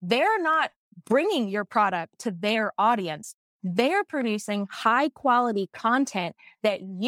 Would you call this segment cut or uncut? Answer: uncut